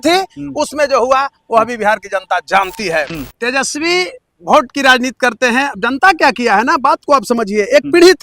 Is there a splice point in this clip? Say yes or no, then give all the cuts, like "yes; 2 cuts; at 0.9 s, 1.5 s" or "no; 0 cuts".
yes; 1 cut; at 3.1 s